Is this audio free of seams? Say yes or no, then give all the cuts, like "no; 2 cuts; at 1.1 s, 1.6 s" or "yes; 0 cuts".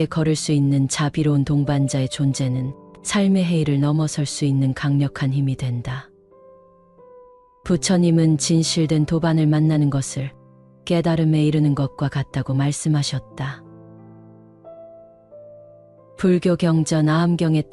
no; 4 cuts; at 6.0 s, 7.6 s, 13.6 s, 16.1 s